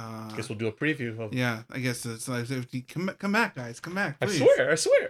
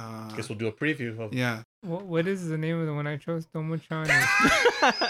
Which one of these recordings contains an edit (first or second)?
second